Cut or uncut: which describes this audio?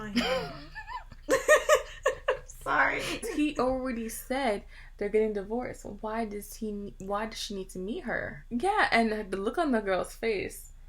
uncut